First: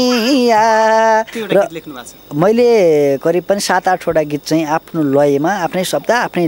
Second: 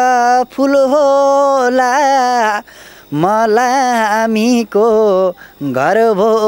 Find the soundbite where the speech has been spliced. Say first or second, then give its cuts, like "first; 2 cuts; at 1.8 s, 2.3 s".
first; 1 cut; at 1.4 s